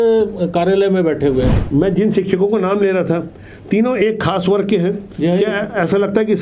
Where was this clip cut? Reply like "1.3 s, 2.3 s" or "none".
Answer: 1.6 s